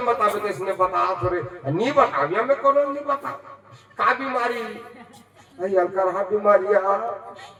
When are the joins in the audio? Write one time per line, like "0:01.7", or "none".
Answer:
none